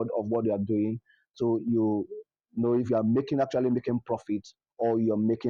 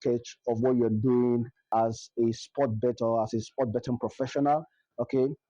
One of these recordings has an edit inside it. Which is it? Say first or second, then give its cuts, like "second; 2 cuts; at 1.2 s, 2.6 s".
second; 1 cut; at 1.6 s